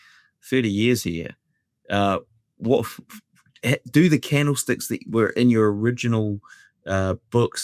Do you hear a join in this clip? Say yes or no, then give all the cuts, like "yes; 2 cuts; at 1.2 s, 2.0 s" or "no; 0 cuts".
no; 0 cuts